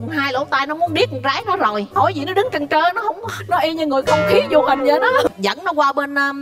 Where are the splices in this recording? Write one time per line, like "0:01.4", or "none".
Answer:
0:05.3